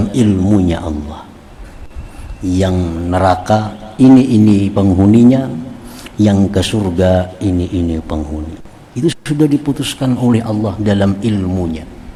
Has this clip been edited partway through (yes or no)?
no